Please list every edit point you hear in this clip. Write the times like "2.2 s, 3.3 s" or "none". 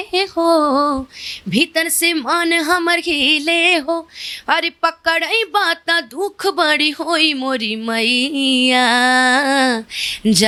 none